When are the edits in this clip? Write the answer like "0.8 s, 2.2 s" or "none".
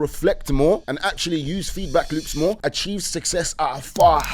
0.8 s, 2.6 s

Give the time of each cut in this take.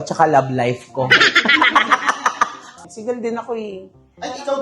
2.7 s

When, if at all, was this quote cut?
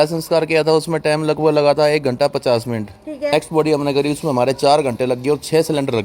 3.3 s

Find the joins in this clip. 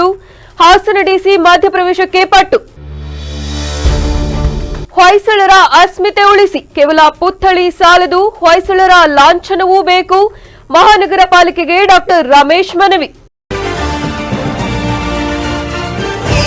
13.2 s

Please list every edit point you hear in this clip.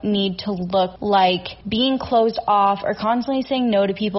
1.0 s, 1.5 s

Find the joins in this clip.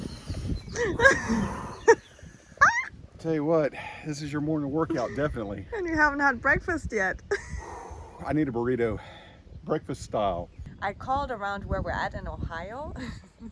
10.6 s

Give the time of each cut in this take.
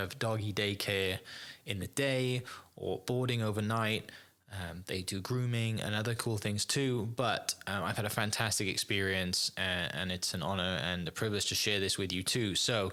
none

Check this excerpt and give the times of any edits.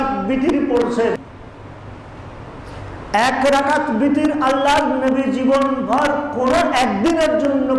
1.2 s

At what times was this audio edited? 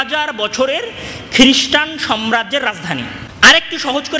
3.2 s

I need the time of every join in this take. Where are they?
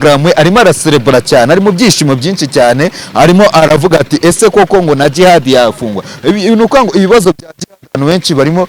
none

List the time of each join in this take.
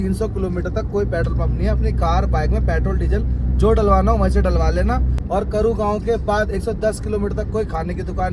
none

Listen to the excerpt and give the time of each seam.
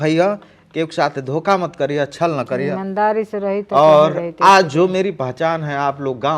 none

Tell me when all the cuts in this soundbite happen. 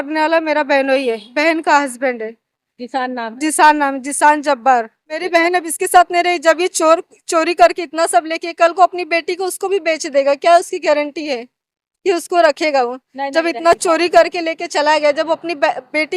5.2 s

